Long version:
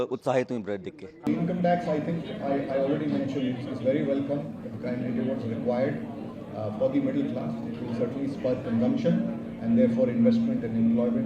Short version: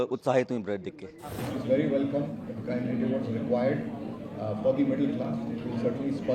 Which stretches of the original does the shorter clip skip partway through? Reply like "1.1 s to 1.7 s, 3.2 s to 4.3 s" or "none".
1.2 s to 3.4 s